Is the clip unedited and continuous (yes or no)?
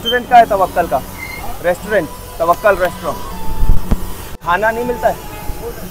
yes